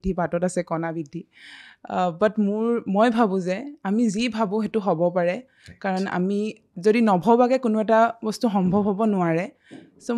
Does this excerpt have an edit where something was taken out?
no; 0 cuts

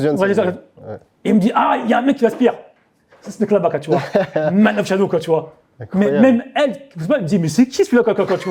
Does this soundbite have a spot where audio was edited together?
no; 0 cuts

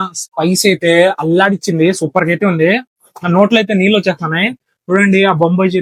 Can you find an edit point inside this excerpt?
no; 0 cuts

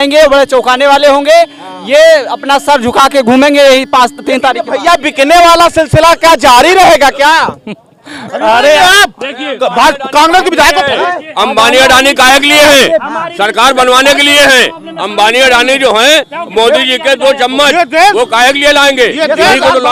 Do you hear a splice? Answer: no; 0 cuts

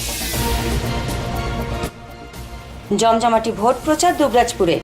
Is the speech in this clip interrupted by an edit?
yes; 1 cut; at 2.3 s

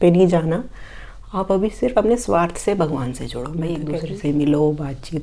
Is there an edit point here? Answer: yes; 1 cut; at 3.9 s

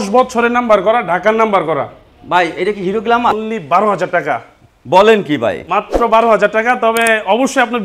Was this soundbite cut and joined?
yes; 1 cut; at 3.3 s

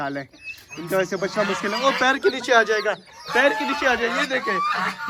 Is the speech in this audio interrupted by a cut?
no; 0 cuts

